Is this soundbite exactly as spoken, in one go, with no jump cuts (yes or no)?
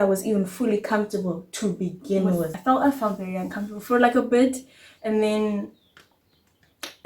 no